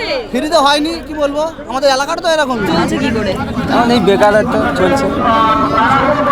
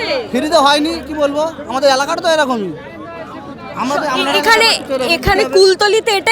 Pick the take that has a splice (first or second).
first